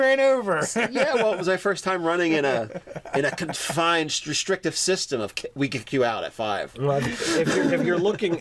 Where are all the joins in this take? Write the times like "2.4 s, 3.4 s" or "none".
none